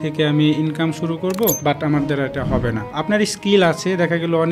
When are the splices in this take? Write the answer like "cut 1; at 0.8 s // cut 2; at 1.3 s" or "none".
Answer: cut 1; at 1.6 s // cut 2; at 2.9 s